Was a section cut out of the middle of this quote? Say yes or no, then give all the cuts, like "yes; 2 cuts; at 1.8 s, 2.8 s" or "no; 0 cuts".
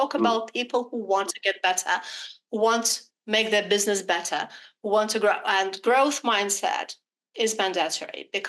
no; 0 cuts